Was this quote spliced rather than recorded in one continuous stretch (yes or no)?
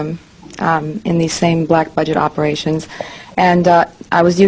no